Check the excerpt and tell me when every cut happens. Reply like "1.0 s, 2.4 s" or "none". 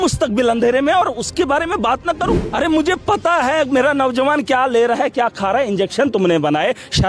2.4 s